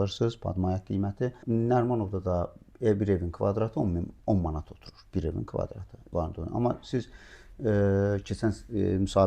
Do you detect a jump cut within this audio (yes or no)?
yes